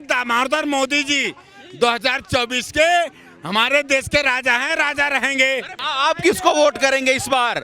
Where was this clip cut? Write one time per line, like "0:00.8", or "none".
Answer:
none